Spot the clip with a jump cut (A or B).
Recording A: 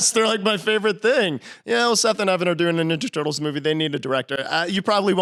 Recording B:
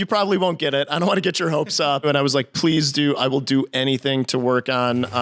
B